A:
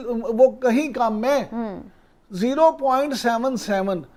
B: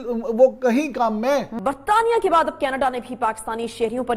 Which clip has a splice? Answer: B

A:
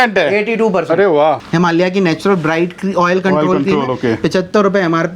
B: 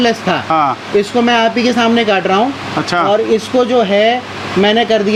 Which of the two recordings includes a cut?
A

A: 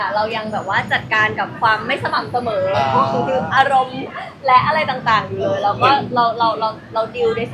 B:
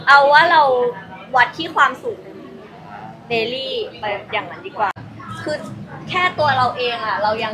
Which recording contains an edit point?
B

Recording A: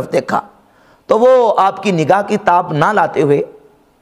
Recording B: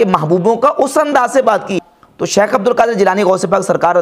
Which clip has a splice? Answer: B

